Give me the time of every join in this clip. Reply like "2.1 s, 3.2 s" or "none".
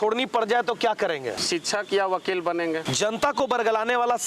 1.4 s, 2.9 s